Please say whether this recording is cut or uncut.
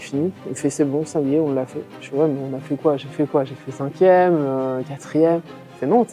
uncut